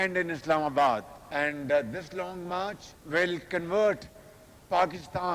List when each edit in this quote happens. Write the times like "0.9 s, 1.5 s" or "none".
none